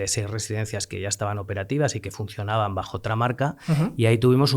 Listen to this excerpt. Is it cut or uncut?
uncut